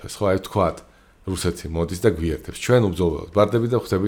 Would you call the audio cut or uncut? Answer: uncut